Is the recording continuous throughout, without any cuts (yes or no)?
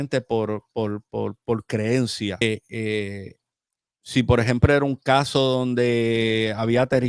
no